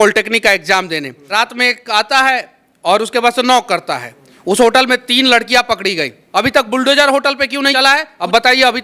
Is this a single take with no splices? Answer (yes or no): no